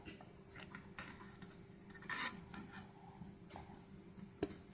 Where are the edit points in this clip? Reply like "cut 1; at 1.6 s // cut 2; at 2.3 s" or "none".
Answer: none